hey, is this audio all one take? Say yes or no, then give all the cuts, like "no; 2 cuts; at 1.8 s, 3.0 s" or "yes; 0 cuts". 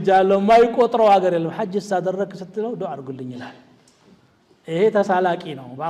yes; 0 cuts